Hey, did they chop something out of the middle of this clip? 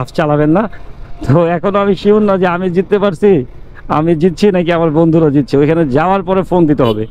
no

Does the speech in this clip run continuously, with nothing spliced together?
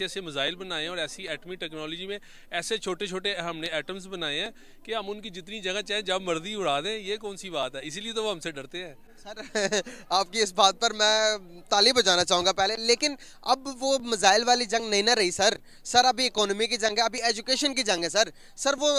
yes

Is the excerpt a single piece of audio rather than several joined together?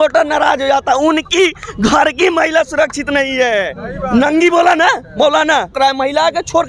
no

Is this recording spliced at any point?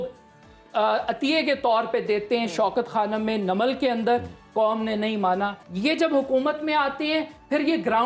yes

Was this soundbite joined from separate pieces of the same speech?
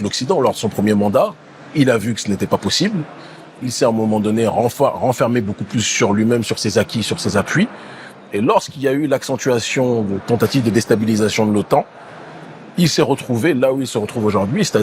no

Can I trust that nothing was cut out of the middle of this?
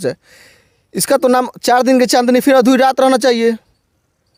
yes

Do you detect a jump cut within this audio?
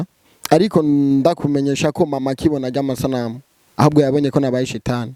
no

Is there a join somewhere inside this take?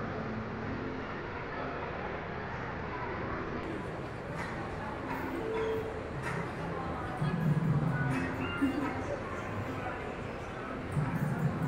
no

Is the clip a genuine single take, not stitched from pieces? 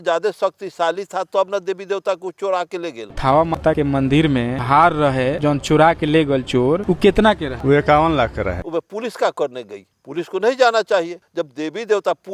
no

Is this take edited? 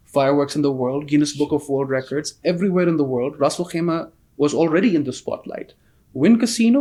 no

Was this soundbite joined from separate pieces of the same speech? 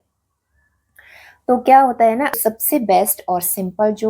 yes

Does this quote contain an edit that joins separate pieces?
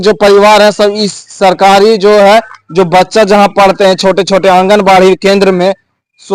no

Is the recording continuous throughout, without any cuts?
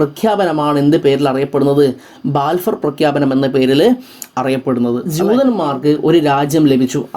no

